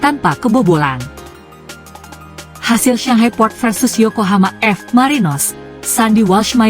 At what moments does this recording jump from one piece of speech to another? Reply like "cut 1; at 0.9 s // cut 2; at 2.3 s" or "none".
cut 1; at 1.1 s // cut 2; at 2.6 s